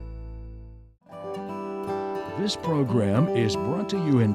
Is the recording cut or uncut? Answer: cut